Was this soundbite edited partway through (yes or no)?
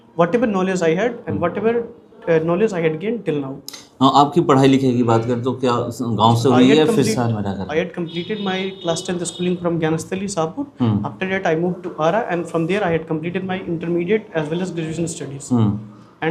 no